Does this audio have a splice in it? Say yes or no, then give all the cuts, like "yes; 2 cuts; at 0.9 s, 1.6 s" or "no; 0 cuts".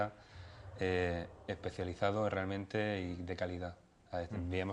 yes; 1 cut; at 1.2 s